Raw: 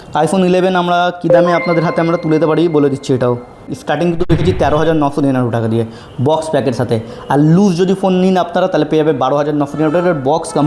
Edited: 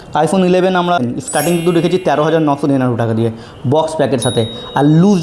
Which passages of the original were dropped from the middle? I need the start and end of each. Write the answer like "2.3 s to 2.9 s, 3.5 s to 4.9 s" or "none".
1.0 s to 3.5 s